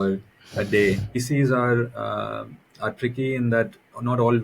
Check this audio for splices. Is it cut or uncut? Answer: cut